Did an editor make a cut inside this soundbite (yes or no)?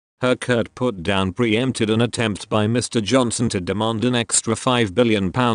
no